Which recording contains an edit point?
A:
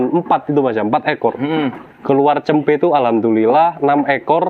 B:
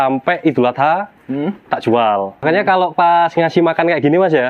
B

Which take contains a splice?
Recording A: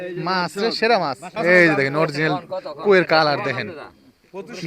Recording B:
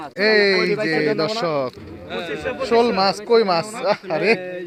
A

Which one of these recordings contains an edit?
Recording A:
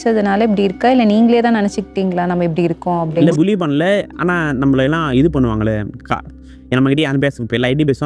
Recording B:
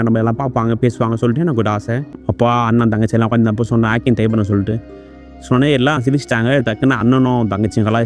B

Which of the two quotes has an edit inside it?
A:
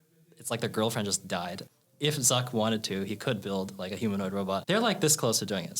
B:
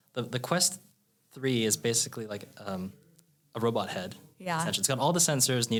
A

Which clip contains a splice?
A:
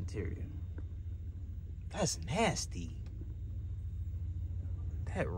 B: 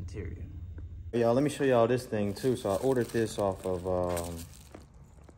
B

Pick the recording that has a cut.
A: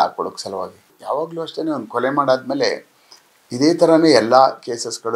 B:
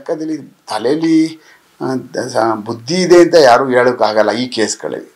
A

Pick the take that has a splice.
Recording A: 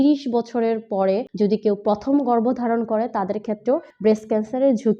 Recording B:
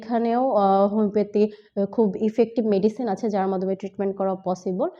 A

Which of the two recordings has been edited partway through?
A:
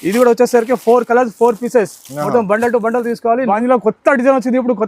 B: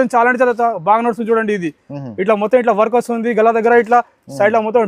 A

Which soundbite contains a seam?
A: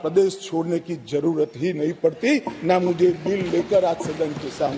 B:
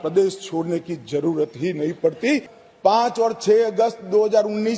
B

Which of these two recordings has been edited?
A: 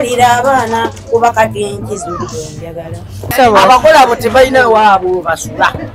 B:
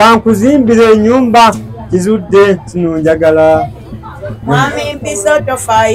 A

